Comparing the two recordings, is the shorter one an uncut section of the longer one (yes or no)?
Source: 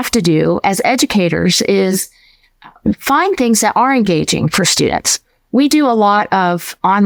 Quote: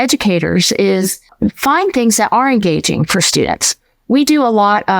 no